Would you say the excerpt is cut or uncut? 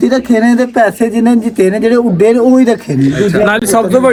uncut